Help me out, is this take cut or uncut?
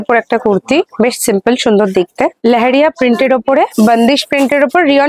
cut